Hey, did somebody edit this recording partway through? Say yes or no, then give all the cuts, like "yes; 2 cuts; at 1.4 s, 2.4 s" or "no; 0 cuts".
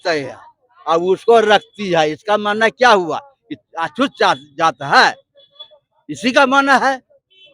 no; 0 cuts